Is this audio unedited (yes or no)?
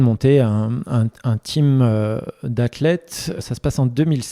no